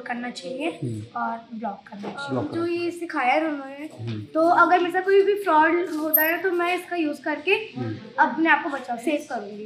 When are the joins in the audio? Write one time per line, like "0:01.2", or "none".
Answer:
0:02.5